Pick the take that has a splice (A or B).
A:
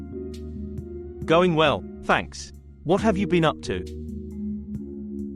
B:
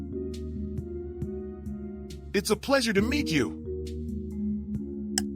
A